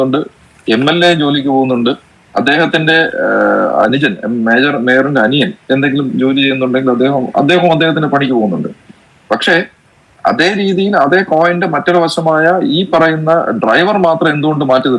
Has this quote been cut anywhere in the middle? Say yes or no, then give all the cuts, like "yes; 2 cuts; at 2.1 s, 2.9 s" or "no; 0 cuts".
no; 0 cuts